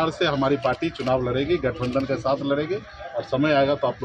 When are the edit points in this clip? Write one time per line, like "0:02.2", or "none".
none